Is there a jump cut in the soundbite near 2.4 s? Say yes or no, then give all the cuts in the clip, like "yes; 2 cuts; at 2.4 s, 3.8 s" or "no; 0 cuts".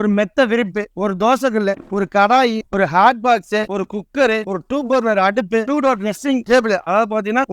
no; 1 cut; at 5.6 s